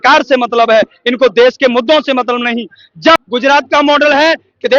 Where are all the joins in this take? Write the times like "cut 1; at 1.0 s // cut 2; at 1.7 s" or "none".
cut 1; at 3.2 s